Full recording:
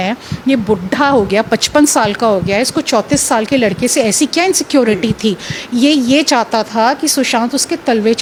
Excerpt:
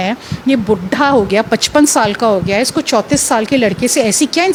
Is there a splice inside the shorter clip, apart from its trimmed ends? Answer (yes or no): no